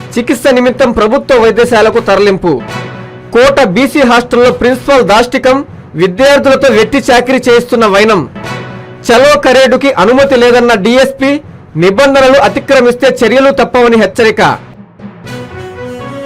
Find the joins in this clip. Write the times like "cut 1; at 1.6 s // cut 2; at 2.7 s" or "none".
cut 1; at 14.7 s